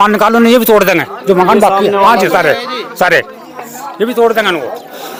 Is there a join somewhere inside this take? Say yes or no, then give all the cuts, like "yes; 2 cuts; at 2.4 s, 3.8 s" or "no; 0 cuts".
no; 0 cuts